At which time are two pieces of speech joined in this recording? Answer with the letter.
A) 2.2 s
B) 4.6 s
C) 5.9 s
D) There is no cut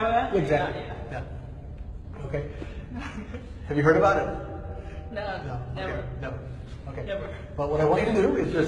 A